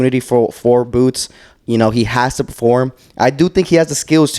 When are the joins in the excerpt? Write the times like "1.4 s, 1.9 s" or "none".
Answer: none